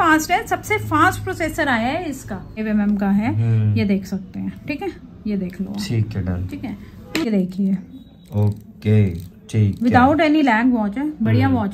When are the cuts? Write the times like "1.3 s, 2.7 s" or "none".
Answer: 2.6 s, 7.3 s